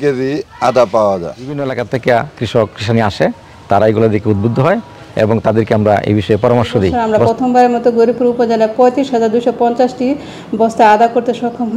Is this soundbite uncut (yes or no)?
no